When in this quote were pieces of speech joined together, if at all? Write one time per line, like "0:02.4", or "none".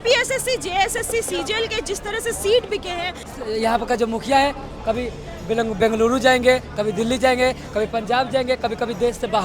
0:03.2